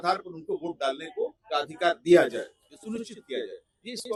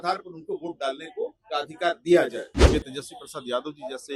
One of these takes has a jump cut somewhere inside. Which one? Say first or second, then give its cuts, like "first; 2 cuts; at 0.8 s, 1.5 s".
second; 1 cut; at 2.6 s